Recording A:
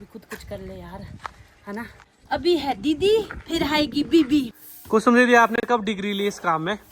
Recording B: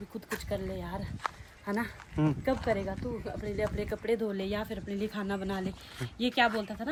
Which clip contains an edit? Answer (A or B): A